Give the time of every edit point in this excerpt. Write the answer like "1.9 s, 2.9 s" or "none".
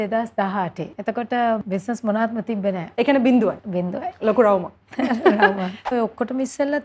0.9 s, 1.6 s, 2.9 s, 3.7 s, 5.9 s